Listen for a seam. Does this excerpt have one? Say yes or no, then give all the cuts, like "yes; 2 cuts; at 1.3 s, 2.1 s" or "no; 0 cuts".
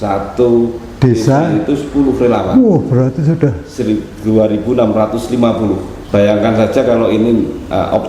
yes; 1 cut; at 5.9 s